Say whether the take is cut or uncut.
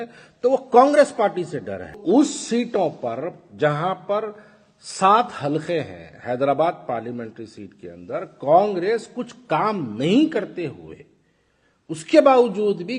cut